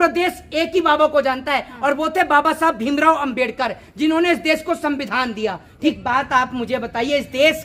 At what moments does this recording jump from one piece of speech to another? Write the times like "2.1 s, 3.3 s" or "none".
5.9 s